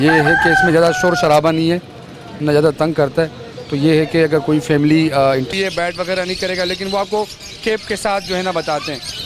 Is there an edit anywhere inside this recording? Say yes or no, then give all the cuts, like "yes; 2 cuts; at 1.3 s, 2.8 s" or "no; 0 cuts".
yes; 1 cut; at 5.5 s